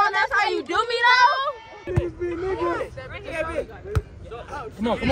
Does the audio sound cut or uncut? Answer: cut